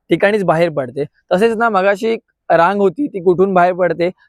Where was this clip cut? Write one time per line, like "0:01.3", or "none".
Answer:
none